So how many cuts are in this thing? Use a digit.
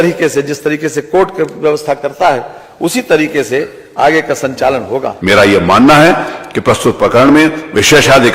1